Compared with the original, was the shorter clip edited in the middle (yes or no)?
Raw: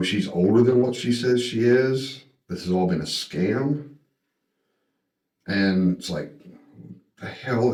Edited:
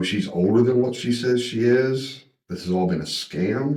no